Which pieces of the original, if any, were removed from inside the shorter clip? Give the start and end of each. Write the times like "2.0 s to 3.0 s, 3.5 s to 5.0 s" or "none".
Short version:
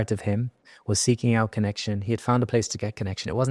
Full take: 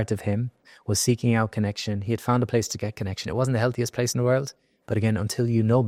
none